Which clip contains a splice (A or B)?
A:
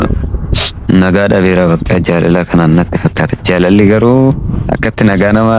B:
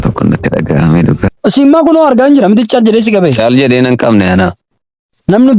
B